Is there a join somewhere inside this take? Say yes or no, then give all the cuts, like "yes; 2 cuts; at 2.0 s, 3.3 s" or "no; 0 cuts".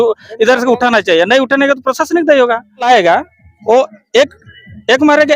yes; 1 cut; at 2.9 s